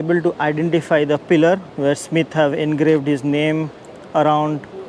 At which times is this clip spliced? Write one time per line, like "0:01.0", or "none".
0:01.9